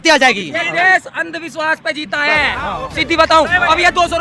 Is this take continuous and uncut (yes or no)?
yes